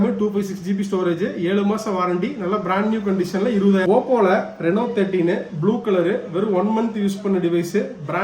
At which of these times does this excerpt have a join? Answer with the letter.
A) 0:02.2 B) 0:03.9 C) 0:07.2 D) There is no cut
B